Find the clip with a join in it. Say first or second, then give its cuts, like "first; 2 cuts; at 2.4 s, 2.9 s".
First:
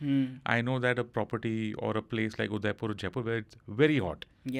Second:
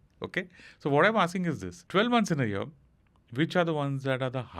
second; 1 cut; at 1.7 s